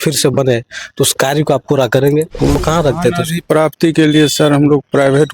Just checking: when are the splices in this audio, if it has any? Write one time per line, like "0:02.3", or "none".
0:02.6

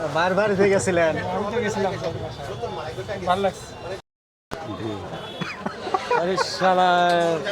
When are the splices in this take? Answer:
0:04.1

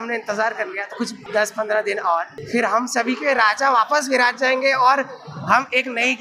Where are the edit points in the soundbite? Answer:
0:01.2
0:02.4

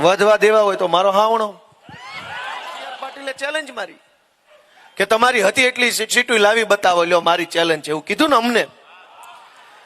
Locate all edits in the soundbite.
0:03.1

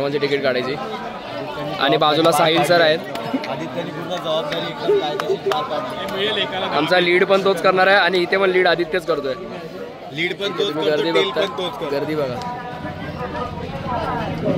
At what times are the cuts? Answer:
none

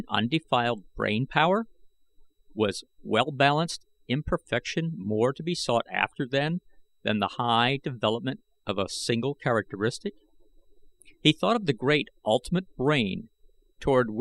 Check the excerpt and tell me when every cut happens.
0:05.0

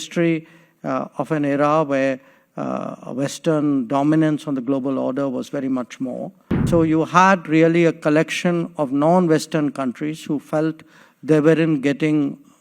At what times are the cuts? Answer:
0:06.6

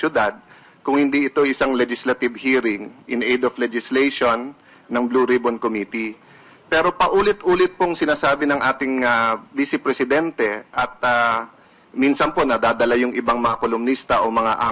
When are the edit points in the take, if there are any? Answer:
0:06.5

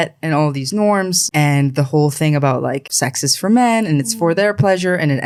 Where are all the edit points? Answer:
none

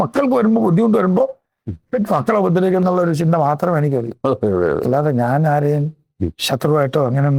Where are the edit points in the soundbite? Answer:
none

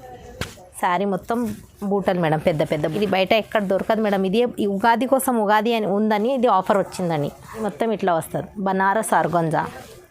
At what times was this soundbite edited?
0:02.9
0:07.6

